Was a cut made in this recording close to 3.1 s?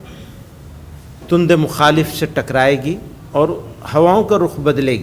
yes; 1 cut; at 3.1 s

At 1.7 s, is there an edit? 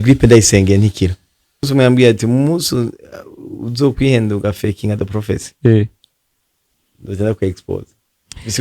yes; 1 cut; at 1.7 s

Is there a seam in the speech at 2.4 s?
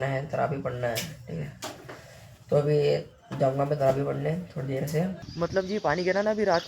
no; 1 cut; at 5.2 s

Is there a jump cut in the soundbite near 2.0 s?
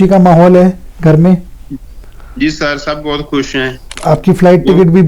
no; 1 cut; at 3.9 s

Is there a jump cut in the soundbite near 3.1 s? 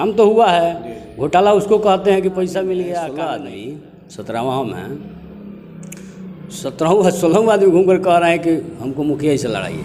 yes; 1 cut; at 3.1 s

